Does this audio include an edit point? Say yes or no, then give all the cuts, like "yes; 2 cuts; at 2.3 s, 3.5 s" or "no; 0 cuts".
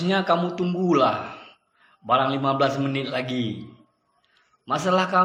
no; 0 cuts